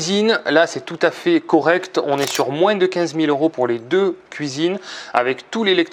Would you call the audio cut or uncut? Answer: uncut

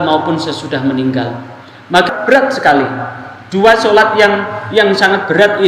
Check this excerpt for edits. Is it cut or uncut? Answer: cut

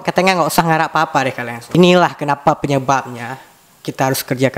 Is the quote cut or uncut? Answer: uncut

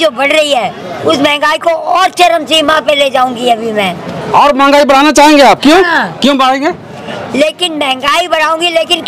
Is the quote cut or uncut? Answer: uncut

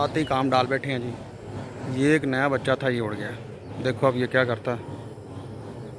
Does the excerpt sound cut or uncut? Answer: uncut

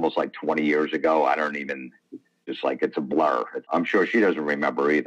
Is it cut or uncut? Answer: cut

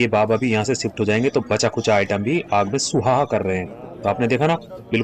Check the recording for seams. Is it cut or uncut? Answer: uncut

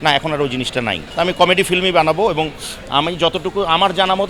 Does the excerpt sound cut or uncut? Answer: cut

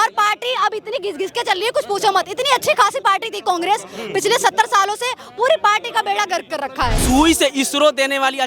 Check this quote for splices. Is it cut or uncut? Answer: cut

